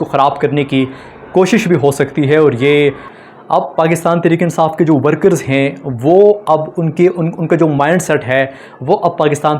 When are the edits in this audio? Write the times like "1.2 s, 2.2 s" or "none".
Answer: 3.1 s